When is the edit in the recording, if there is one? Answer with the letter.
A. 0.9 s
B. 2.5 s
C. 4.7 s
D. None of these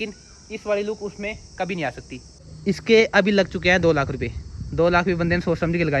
B